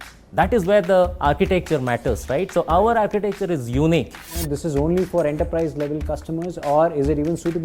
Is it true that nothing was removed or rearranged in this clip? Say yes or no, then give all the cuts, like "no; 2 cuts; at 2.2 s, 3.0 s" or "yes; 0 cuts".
no; 1 cut; at 4.4 s